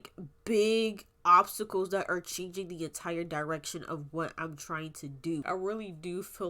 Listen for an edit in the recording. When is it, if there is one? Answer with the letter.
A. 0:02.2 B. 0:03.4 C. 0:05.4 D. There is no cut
C